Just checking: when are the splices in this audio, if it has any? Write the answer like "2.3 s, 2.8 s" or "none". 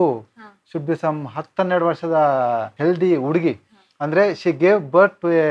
2.7 s

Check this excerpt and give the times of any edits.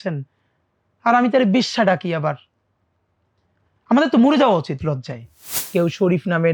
5.5 s

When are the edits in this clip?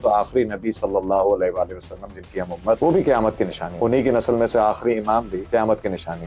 2.8 s, 3.6 s, 5.4 s

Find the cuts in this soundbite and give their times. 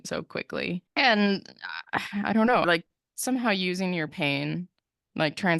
2.6 s

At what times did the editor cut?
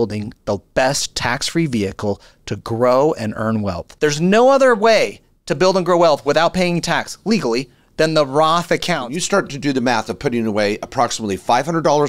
3.8 s, 9.0 s

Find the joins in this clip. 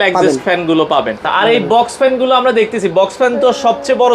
1.2 s

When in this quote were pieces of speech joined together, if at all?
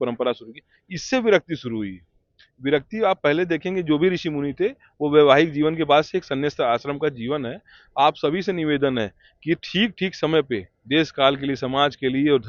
none

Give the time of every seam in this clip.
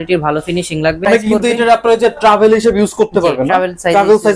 1.1 s

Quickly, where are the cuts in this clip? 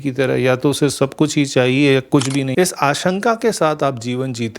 2.5 s

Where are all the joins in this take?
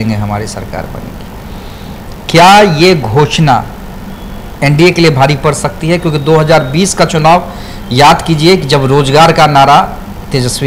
none

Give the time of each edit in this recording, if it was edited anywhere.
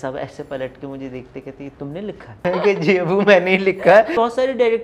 2.5 s, 4.2 s

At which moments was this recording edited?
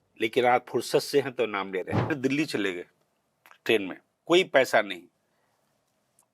2.1 s

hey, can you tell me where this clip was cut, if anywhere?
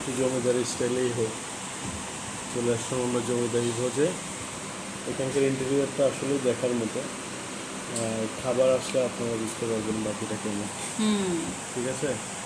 none

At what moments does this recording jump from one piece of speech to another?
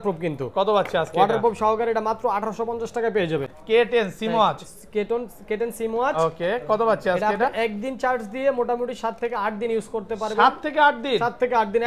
3.5 s

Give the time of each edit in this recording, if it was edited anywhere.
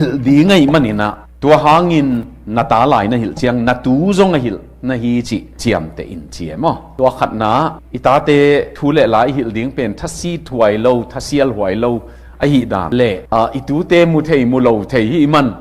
none

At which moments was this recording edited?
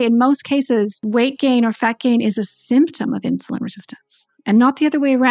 1.0 s

